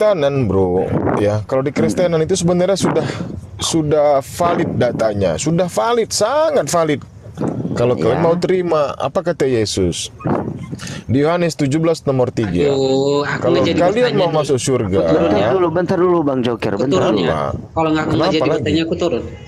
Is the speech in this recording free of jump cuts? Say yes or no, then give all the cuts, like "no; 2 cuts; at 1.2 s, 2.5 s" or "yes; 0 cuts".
yes; 0 cuts